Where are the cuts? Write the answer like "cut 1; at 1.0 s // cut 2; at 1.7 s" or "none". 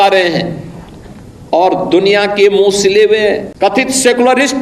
cut 1; at 3.5 s